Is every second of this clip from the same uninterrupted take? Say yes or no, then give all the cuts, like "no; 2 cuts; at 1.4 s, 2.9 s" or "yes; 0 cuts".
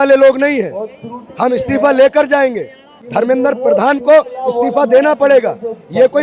yes; 0 cuts